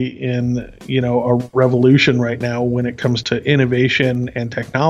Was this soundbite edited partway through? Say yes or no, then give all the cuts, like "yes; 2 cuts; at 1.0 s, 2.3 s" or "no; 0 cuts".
yes; 1 cut; at 3.2 s